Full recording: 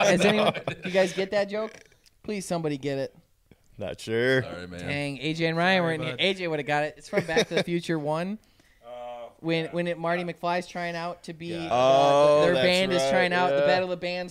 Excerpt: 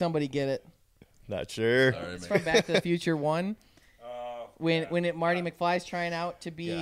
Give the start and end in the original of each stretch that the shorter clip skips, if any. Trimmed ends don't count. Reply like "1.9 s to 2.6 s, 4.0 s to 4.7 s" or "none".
4.7 s to 7.0 s